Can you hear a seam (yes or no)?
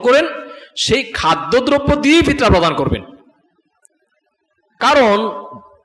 no